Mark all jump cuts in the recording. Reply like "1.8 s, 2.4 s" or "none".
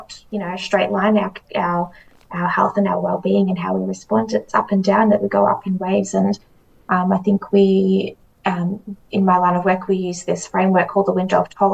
none